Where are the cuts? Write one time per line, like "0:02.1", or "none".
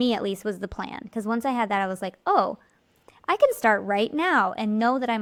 none

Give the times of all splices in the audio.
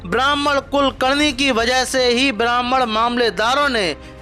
none

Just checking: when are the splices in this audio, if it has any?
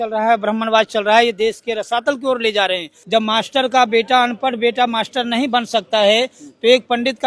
0:02.9

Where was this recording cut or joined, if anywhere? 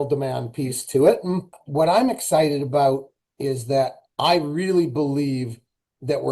0:01.6

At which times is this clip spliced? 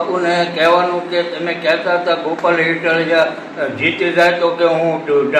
none

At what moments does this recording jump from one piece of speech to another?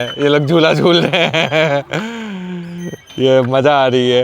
none

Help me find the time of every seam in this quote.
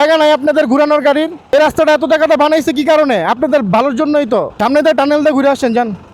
0:01.5
0:04.5

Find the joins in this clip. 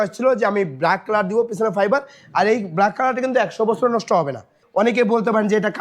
0:04.6

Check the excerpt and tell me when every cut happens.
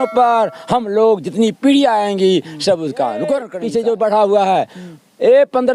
0:03.5

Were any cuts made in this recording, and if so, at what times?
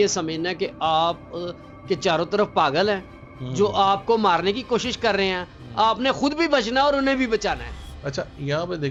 none

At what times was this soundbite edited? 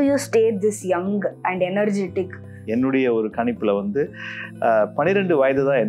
0:02.6

